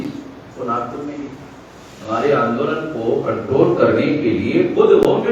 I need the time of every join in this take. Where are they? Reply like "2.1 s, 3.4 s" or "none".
none